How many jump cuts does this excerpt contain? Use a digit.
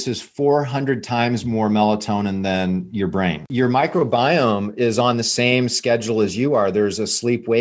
1